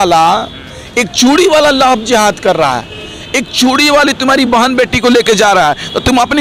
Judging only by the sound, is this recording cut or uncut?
uncut